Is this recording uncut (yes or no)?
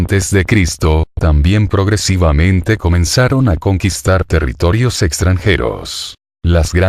yes